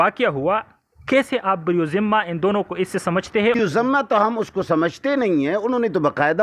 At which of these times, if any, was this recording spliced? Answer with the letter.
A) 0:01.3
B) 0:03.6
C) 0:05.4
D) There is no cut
B